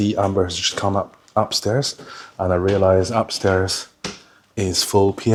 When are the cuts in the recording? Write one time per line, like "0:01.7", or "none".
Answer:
none